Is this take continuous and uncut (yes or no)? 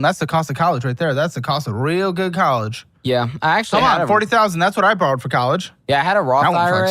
no